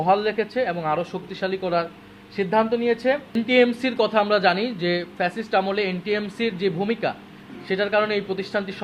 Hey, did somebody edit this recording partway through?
yes; 1 cut; at 3.3 s

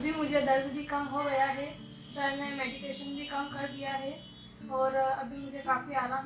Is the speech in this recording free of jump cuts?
yes; 0 cuts

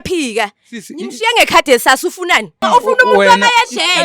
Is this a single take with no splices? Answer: no; 1 cut; at 2.6 s

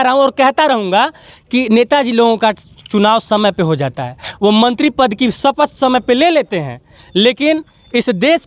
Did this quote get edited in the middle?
no; 0 cuts

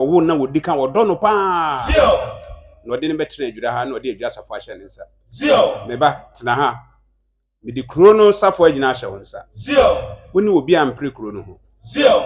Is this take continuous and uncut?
yes; 0 cuts

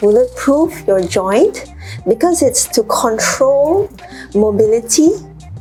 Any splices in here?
no; 0 cuts

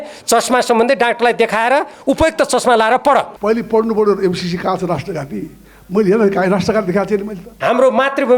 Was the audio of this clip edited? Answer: yes; 2 cuts; at 3.3 s, 7.5 s

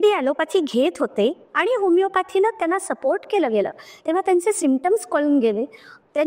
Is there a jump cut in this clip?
no; 0 cuts

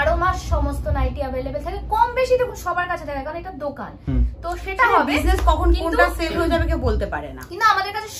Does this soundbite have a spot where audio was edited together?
no; 0 cuts

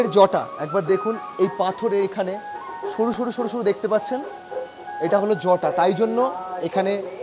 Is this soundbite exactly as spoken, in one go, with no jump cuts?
yes; 0 cuts

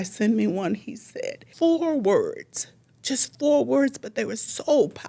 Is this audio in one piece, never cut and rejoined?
no; 1 cut; at 1.4 s

